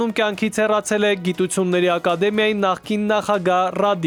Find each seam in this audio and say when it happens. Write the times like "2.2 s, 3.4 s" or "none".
none